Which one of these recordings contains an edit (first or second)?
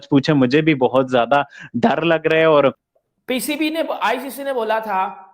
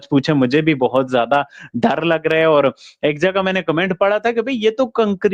first